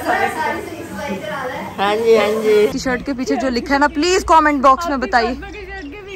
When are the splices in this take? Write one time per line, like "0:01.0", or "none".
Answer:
0:02.7